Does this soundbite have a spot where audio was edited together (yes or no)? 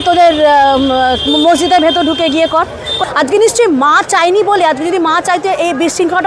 yes